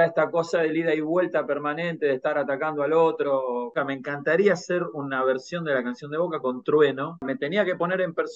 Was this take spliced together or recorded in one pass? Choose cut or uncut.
cut